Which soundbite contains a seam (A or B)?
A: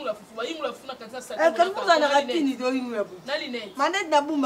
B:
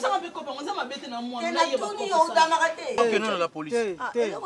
B